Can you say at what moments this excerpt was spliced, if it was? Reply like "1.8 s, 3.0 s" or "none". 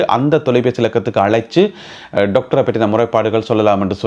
none